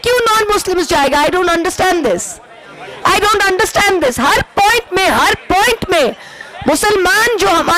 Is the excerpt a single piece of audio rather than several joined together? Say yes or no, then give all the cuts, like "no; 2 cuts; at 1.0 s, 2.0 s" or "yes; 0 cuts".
yes; 0 cuts